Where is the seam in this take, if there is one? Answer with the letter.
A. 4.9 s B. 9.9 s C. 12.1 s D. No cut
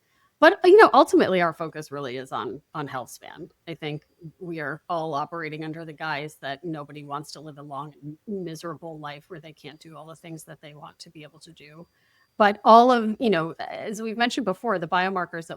C